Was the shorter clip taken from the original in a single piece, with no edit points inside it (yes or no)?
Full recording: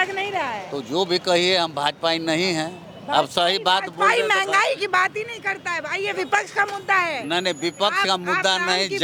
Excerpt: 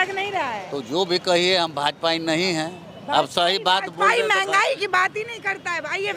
yes